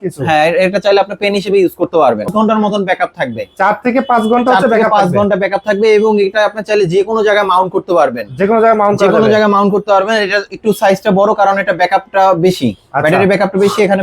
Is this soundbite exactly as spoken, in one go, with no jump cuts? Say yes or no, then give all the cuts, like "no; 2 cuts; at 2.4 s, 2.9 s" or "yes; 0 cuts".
no; 1 cut; at 2.3 s